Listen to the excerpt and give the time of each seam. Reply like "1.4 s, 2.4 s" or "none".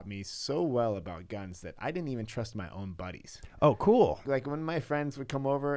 4.2 s